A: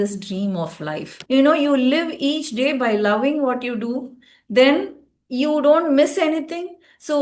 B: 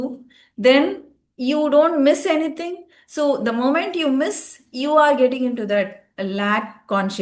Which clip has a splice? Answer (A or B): A